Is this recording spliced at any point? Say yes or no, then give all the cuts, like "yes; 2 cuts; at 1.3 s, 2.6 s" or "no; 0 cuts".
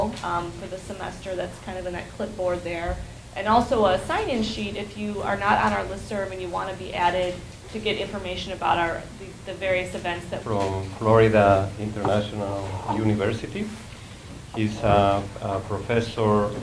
no; 0 cuts